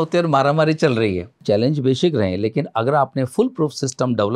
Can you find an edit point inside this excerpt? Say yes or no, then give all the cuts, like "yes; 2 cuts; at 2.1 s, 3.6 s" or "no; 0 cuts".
yes; 1 cut; at 1.4 s